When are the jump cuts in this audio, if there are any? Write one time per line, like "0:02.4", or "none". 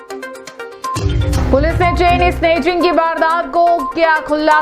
0:00.9